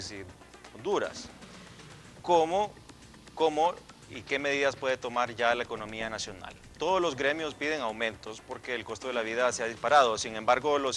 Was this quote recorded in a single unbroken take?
no; 1 cut; at 6.2 s

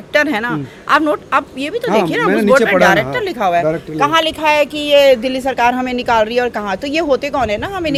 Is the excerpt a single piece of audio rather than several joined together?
yes; 0 cuts

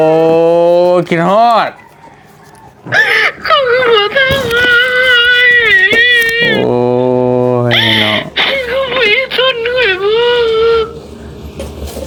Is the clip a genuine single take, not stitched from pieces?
yes; 0 cuts

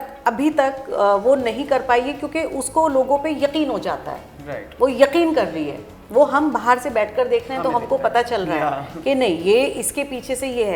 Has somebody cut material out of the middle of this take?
no; 0 cuts

